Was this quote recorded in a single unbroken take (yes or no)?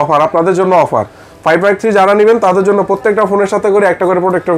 yes